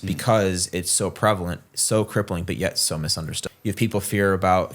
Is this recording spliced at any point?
yes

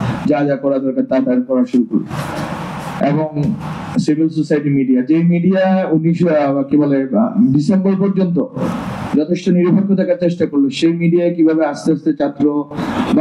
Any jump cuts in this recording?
no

